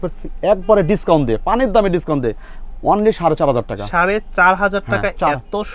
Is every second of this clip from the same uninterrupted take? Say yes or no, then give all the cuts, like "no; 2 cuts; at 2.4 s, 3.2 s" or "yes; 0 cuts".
yes; 0 cuts